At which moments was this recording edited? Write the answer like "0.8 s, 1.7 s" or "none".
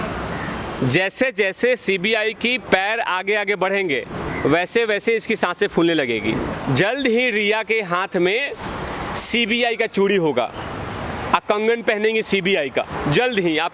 6.5 s